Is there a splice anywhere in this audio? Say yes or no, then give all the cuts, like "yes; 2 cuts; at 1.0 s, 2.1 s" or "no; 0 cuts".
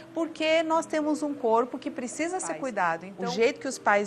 yes; 1 cut; at 3.1 s